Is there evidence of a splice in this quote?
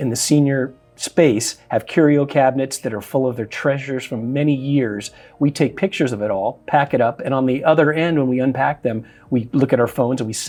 no; 0 cuts

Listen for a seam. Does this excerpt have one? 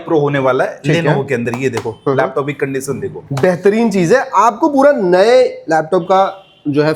no; 0 cuts

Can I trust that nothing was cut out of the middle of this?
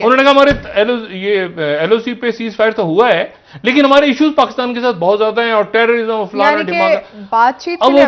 yes; 0 cuts

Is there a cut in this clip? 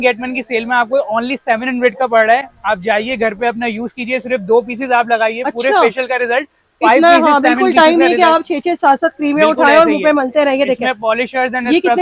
no; 0 cuts

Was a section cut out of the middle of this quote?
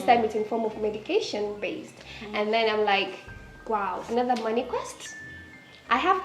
no; 0 cuts

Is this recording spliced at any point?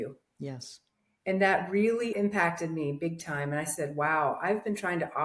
yes; 1 cut; at 2.1 s

